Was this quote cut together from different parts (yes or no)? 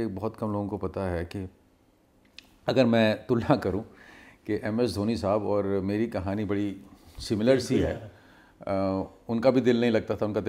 no